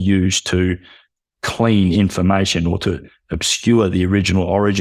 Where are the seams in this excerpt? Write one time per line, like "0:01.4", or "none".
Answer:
none